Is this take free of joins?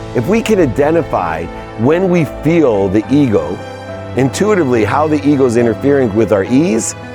yes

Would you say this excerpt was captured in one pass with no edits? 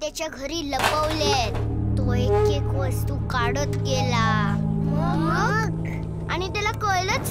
yes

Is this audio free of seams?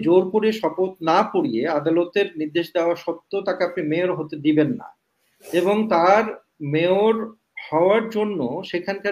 yes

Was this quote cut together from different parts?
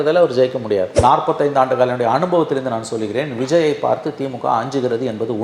yes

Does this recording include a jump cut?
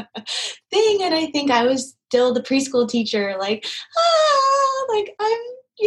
no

